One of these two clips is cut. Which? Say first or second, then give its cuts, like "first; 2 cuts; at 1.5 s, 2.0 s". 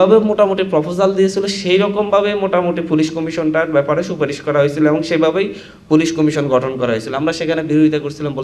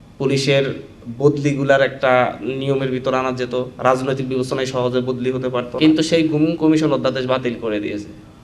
second; 1 cut; at 5.7 s